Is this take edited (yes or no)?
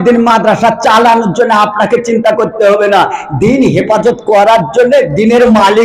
no